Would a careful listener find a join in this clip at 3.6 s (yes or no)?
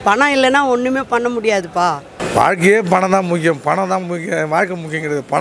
no